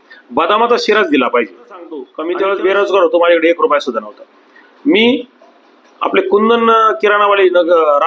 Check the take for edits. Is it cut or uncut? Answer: cut